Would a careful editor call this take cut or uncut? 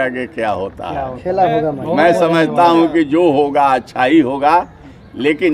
uncut